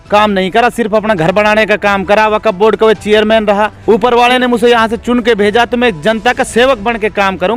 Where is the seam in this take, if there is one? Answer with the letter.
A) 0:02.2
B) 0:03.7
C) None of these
B